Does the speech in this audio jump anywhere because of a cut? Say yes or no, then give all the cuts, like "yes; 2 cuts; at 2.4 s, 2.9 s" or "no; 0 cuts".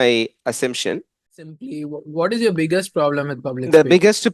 yes; 1 cut; at 1.6 s